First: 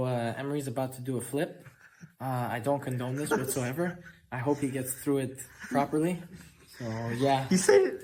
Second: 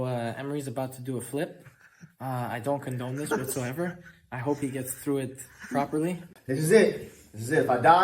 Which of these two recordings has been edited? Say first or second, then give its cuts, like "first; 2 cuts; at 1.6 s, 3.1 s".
second; 1 cut; at 6.3 s